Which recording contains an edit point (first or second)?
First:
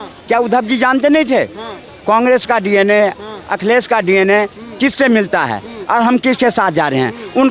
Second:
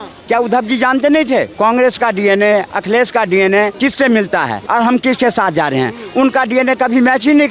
second